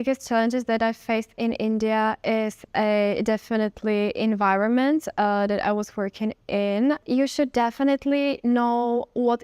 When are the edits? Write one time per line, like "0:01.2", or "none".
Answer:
0:07.0

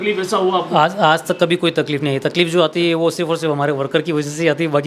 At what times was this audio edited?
none

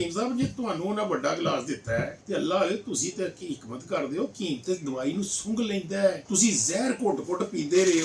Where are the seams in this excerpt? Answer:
0:02.2
0:06.2

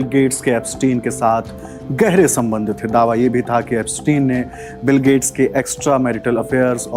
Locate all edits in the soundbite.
none

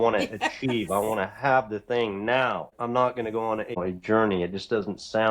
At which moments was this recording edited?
0:02.7
0:03.8

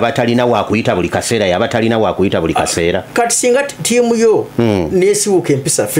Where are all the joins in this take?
none

